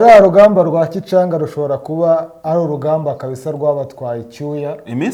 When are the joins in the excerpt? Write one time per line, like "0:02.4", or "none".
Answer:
none